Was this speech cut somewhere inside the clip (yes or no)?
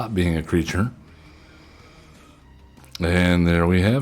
yes